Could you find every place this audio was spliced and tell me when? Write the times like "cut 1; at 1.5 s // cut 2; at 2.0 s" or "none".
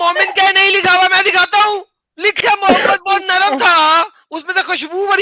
cut 1; at 2.4 s